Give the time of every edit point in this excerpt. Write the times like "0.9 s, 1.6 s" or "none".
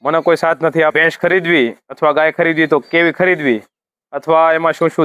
0.9 s

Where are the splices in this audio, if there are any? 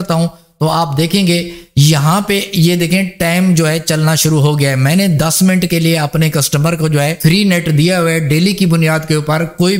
7.2 s

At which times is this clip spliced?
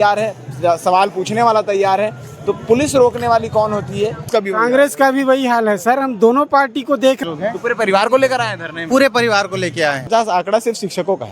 4.3 s, 7.2 s, 10.1 s

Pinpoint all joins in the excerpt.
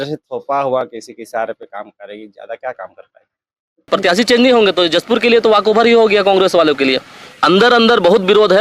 3.9 s, 7.3 s

